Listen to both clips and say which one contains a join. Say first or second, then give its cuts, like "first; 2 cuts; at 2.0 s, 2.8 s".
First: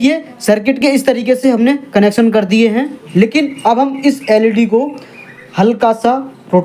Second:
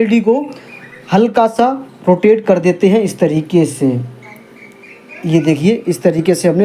first; 1 cut; at 3.0 s